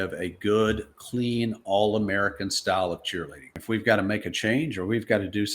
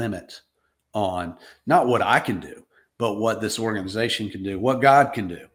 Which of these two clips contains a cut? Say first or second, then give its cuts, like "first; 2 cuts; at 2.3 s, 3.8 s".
first; 1 cut; at 3.6 s